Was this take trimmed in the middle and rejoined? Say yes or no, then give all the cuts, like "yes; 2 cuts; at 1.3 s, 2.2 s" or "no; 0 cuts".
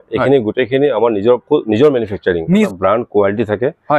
yes; 1 cut; at 2.4 s